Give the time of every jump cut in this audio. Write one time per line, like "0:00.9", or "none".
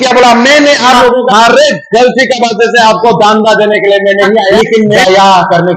0:01.3
0:04.8